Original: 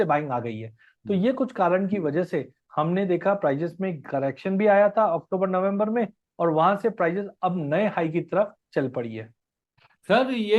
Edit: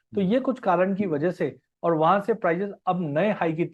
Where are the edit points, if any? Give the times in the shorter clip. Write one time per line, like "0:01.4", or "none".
0:01.7